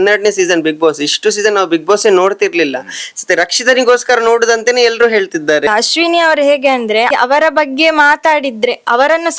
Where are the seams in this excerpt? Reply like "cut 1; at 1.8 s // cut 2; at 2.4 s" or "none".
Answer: cut 1; at 5.7 s // cut 2; at 7.1 s